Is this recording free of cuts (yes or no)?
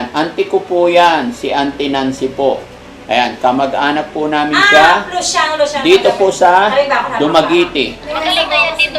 no